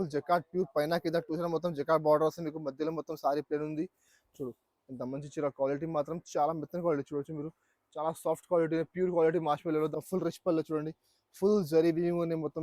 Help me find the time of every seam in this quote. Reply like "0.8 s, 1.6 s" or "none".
9.9 s